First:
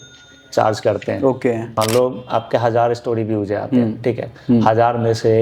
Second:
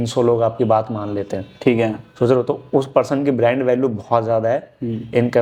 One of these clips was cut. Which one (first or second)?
first